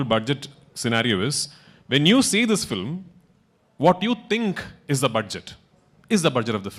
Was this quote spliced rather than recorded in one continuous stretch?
no; 0 cuts

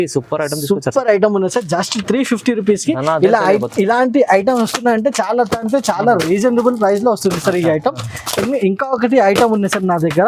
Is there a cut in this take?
no; 0 cuts

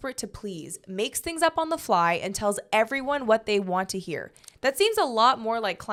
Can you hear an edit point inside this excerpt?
no; 0 cuts

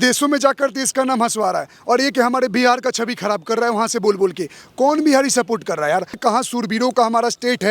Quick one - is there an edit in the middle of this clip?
yes; 1 cut; at 6.2 s

